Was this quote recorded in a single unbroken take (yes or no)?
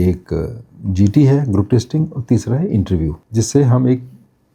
no